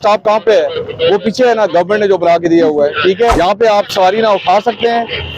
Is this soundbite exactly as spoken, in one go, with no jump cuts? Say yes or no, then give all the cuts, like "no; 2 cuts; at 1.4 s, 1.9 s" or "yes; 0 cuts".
no; 1 cut; at 3.3 s